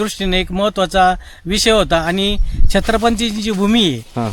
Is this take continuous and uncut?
yes; 0 cuts

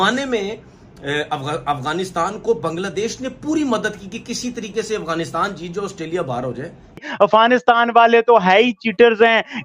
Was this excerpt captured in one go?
no; 1 cut; at 7.0 s

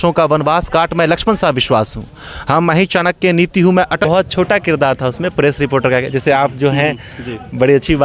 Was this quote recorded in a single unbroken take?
no; 1 cut; at 4.0 s

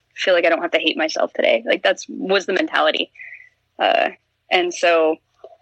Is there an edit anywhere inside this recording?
no; 0 cuts

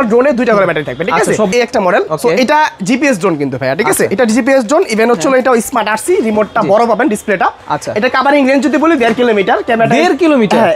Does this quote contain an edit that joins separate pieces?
yes; 1 cut; at 1.7 s

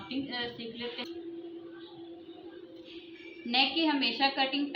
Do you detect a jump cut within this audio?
yes; 1 cut; at 1.0 s

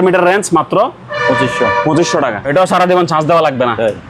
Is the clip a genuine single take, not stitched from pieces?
no; 1 cut; at 2.4 s

